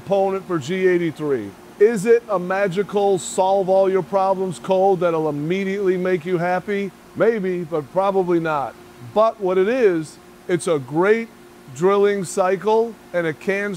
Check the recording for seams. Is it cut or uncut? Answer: cut